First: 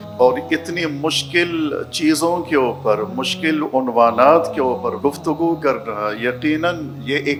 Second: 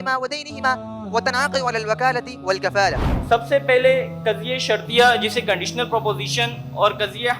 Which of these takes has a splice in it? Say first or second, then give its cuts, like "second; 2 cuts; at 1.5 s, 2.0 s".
second; 1 cut; at 3.0 s